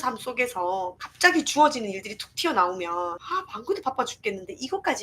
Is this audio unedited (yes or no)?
no